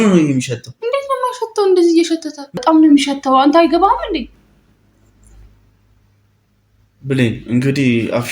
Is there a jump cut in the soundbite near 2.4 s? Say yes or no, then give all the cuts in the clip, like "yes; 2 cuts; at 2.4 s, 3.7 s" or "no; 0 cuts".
yes; 1 cut; at 2.4 s